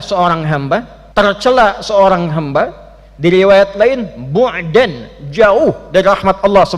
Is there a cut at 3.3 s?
no; 1 cut; at 1.0 s

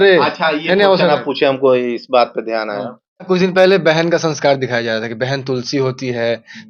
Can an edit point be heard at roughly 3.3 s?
yes; 1 cut; at 3.3 s

